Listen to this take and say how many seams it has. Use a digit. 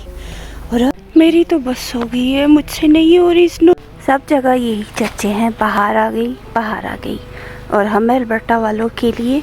2